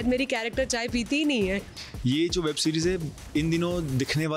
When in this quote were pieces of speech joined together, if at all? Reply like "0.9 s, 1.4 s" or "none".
1.7 s

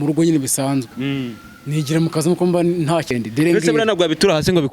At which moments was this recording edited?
3.1 s

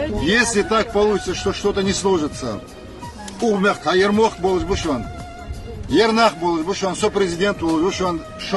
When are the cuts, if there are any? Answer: none

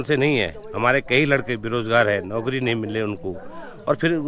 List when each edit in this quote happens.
none

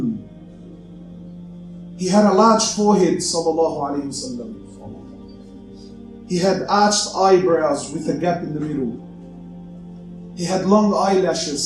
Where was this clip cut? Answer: none

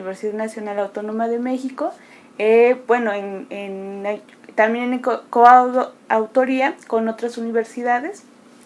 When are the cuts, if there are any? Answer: 7.2 s

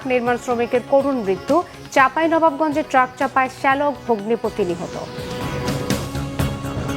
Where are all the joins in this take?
5.8 s

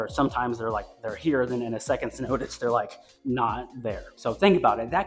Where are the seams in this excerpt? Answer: 4.1 s

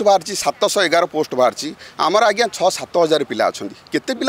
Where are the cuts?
none

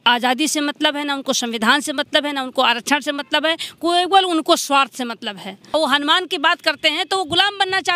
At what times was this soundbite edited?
5.6 s

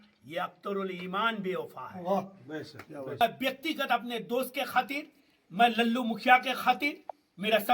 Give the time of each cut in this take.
3.2 s

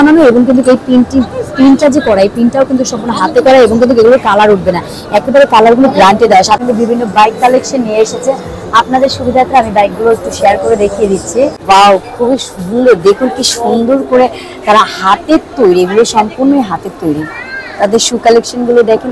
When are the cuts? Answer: 6.6 s, 11.6 s

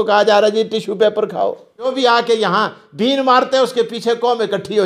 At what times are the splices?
1.9 s

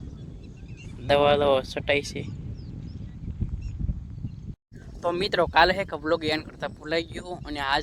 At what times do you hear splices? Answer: 4.5 s

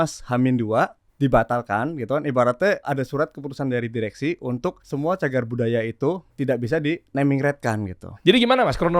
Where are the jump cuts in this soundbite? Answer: 1.0 s, 2.9 s, 4.8 s, 6.3 s, 8.1 s

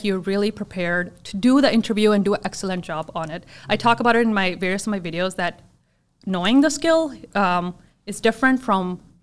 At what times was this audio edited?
none

